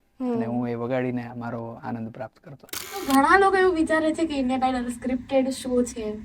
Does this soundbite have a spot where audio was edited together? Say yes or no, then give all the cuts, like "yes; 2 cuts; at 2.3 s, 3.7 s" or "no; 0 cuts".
yes; 1 cut; at 3.0 s